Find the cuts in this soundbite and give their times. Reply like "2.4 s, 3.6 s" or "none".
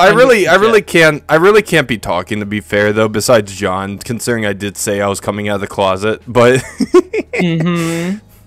none